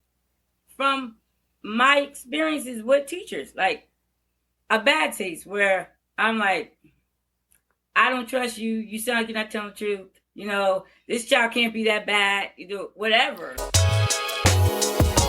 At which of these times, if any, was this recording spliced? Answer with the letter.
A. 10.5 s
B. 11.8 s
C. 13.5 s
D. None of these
C